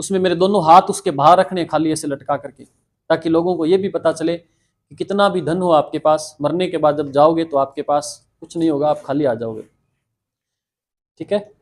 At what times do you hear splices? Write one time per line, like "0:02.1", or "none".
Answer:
none